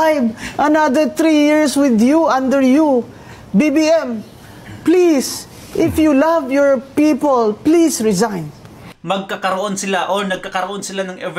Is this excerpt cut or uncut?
cut